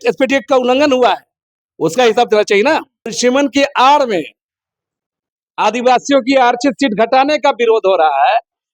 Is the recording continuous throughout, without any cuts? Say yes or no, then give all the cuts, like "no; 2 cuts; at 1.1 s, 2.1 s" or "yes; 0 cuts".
no; 1 cut; at 3.2 s